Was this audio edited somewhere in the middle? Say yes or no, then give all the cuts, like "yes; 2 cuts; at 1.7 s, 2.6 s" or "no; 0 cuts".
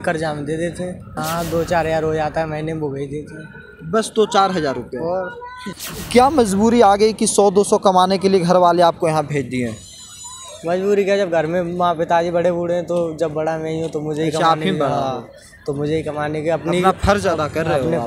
yes; 2 cuts; at 1.1 s, 5.7 s